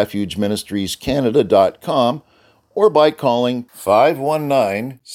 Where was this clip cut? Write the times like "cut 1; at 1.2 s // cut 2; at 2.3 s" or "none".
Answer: none